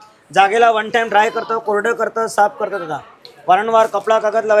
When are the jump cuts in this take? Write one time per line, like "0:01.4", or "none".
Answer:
none

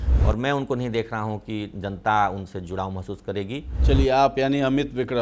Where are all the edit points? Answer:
0:03.7

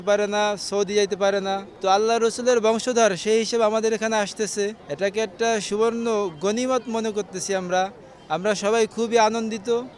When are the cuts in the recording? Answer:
none

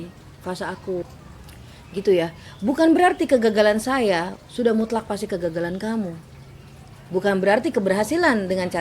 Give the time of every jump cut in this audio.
0:01.0

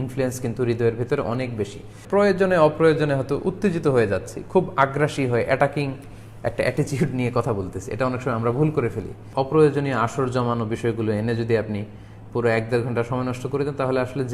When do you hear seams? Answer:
0:01.9
0:09.2

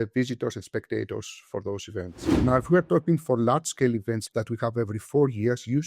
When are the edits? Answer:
0:02.2
0:04.2

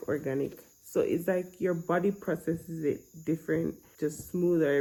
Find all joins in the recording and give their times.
none

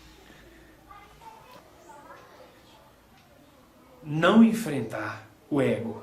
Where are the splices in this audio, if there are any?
0:01.6

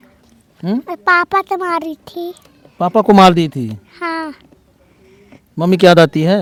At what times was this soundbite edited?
none

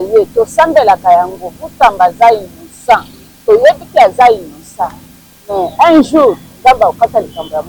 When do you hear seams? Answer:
none

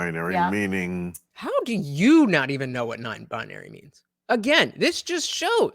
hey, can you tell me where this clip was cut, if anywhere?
0:01.3

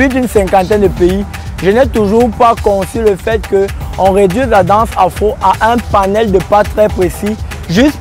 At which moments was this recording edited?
none

